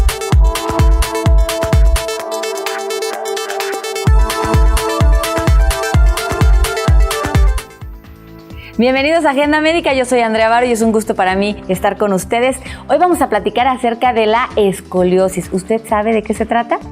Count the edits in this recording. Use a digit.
1